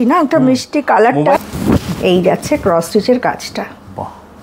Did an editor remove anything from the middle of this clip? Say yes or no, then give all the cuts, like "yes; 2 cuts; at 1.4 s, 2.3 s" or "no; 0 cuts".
yes; 1 cut; at 1.4 s